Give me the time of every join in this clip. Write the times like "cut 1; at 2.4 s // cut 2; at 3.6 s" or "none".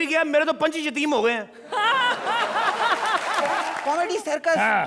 cut 1; at 3.7 s